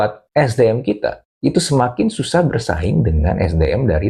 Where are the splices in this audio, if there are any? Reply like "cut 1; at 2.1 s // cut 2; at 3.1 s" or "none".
none